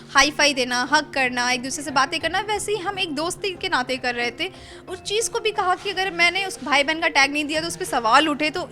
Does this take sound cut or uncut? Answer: uncut